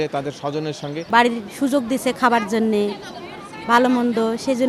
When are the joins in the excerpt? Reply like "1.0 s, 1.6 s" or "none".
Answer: 1.0 s